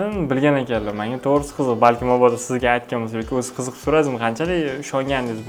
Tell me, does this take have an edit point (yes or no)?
no